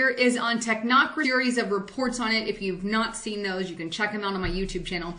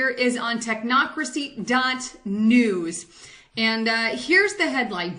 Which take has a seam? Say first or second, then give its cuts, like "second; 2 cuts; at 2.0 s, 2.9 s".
second; 1 cut; at 1.2 s